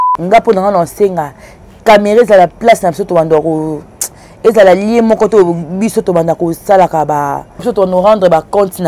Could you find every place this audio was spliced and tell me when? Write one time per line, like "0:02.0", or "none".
0:07.7